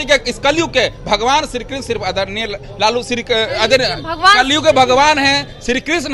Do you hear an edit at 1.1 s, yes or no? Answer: no